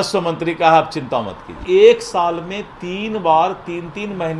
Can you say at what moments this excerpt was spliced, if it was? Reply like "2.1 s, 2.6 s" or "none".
1.6 s